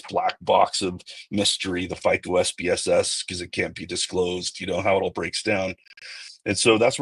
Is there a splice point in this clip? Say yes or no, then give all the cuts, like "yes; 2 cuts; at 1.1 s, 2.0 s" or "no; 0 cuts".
no; 0 cuts